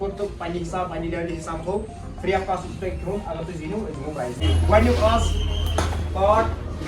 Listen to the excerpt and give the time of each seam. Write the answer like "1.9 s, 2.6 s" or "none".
4.4 s